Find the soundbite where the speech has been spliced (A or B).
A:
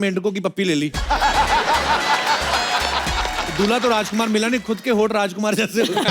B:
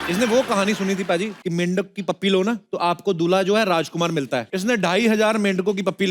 B